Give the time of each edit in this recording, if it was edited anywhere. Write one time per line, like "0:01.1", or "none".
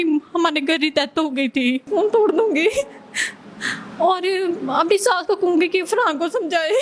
0:01.9